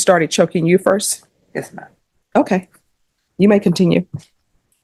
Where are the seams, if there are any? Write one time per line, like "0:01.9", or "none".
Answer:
none